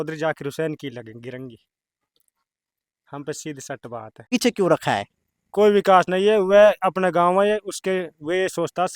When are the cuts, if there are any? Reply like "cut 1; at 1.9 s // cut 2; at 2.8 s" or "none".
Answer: cut 1; at 4.3 s